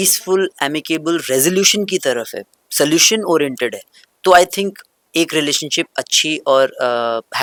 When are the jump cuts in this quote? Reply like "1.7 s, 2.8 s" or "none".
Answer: none

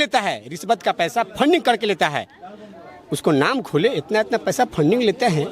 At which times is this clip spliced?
none

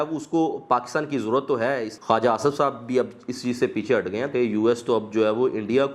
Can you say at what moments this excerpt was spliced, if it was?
1.9 s, 4.3 s

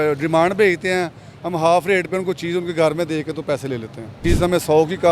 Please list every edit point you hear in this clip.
4.2 s

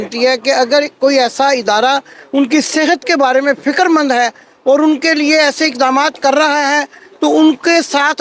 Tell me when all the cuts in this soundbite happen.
none

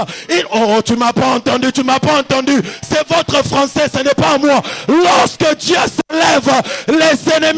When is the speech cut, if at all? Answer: none

